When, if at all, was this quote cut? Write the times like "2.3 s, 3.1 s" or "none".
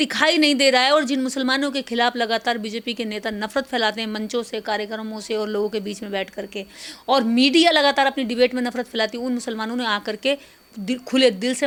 none